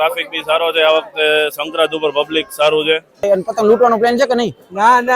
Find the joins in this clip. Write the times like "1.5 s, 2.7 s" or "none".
3.2 s